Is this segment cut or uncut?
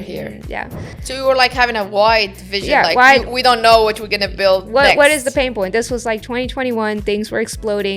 cut